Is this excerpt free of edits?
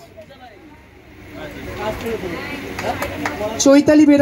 yes; 0 cuts

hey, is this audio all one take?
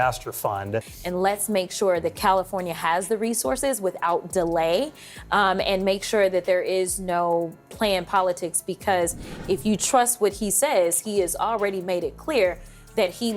no; 1 cut; at 1.0 s

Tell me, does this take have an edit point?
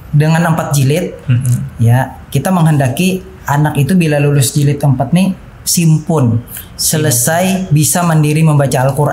no; 0 cuts

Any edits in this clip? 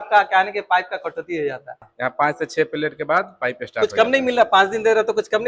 yes; 1 cut; at 1.9 s

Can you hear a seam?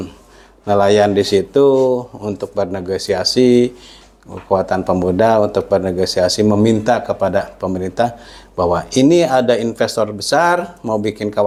no; 0 cuts

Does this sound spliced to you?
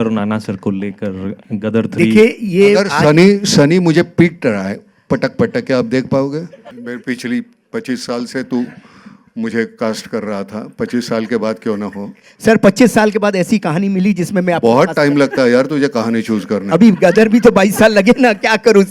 yes; 1 cut; at 6.6 s

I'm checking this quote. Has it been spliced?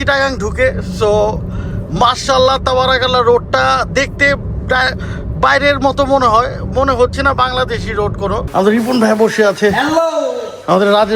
yes; 1 cut; at 8.4 s

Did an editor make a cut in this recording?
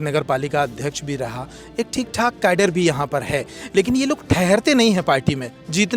no; 0 cuts

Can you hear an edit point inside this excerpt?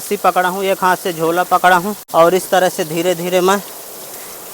yes; 1 cut; at 2.0 s

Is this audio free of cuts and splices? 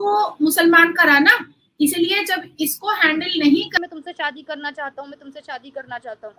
no; 1 cut; at 3.8 s

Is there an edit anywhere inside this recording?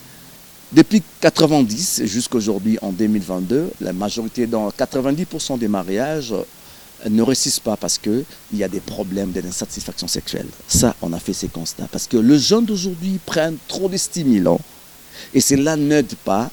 no; 0 cuts

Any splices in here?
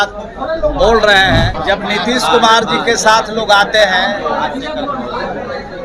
yes; 1 cut; at 1.6 s

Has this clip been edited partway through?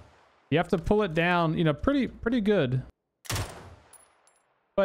yes; 1 cut; at 3.1 s

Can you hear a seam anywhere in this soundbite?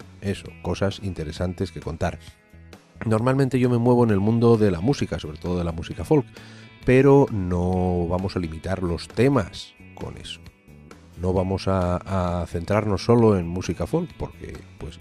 yes; 1 cut; at 11.6 s

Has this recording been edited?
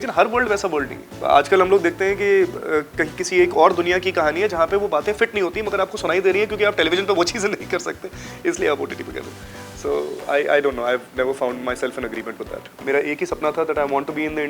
yes; 2 cuts; at 1.1 s, 12.8 s

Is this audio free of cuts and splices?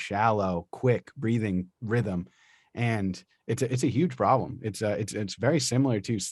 no; 1 cut; at 1.7 s

